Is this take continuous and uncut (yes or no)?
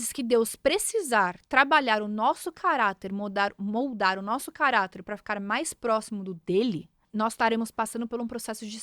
no